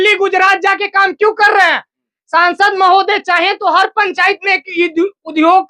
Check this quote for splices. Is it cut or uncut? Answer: uncut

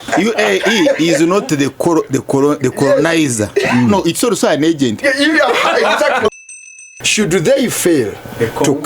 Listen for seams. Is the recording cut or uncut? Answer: cut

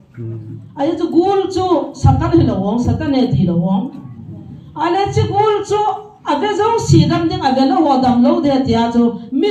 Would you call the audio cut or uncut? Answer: uncut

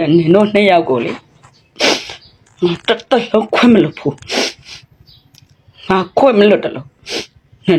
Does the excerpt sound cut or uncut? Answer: uncut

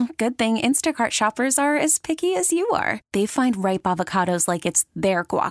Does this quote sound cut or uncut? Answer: uncut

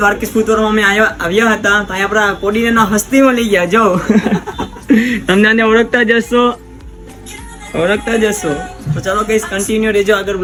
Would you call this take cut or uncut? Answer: uncut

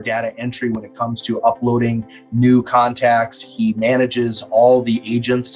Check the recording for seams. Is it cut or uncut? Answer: uncut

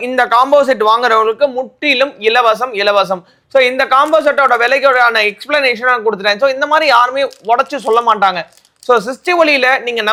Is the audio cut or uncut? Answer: uncut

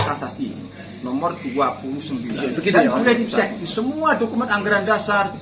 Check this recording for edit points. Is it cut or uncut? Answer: cut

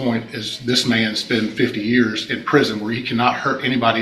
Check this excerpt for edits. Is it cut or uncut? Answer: uncut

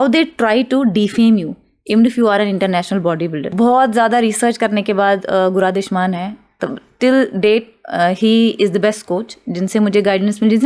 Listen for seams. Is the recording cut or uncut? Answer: cut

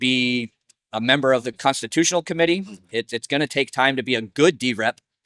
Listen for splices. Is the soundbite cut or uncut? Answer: cut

